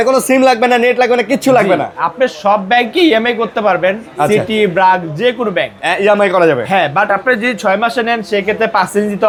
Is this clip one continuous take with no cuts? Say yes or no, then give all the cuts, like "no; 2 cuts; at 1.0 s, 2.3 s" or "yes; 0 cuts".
yes; 0 cuts